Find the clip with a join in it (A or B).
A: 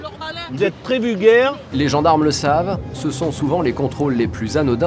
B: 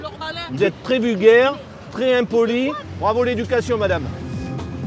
A